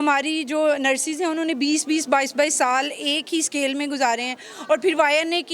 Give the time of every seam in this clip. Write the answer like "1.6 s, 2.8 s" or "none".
none